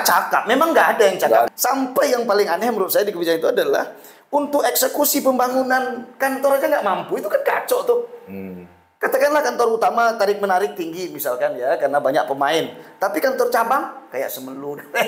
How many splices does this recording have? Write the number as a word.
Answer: one